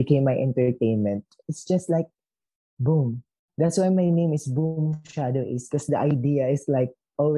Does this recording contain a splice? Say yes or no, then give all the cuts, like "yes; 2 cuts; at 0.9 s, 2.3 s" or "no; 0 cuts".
yes; 1 cut; at 1.4 s